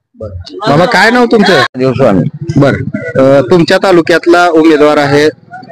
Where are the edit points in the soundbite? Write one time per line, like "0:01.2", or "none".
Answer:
0:01.8